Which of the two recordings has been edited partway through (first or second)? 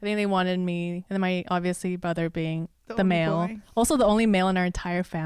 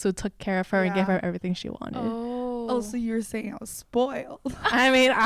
first